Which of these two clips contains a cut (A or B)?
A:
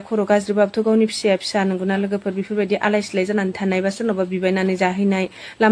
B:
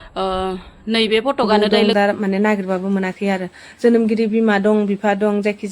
B